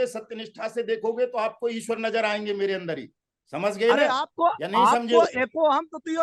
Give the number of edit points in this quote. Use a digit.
0